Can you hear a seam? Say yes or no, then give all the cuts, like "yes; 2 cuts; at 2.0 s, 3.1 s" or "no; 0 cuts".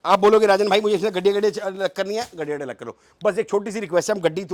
no; 0 cuts